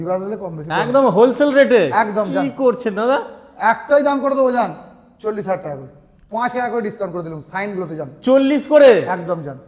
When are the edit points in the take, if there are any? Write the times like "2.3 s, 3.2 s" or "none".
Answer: none